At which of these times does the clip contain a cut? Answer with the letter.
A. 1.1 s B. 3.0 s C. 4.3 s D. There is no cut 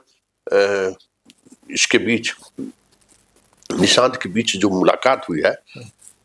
D